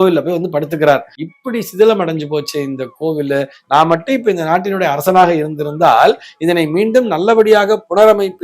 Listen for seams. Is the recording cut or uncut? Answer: cut